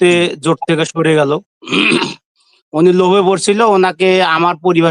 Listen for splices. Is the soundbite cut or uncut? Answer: uncut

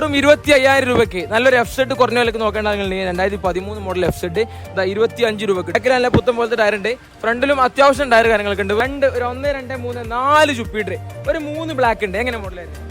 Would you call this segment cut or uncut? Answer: cut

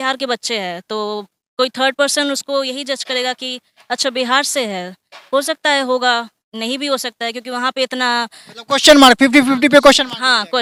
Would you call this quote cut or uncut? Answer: uncut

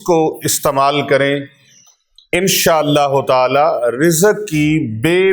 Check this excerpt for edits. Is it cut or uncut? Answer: uncut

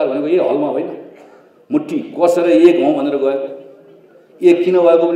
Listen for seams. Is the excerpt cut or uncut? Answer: uncut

